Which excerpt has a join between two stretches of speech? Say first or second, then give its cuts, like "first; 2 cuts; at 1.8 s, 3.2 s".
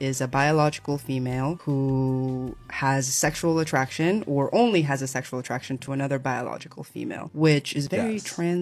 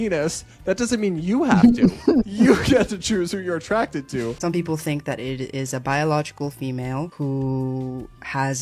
second; 1 cut; at 4.4 s